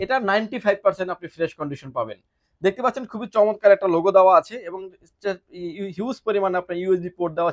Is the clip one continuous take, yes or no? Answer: yes